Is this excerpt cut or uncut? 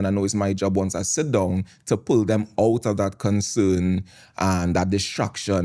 uncut